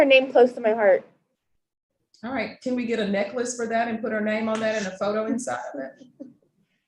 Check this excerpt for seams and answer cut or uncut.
uncut